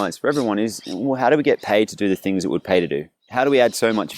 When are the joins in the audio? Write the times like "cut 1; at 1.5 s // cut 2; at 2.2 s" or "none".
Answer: cut 1; at 3.2 s